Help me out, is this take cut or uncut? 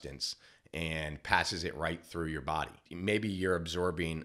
cut